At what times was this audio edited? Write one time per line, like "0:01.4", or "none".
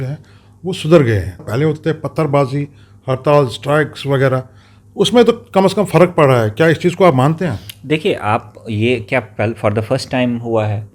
0:01.5